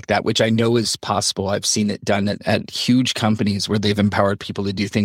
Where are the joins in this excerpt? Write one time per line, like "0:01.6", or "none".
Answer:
0:02.4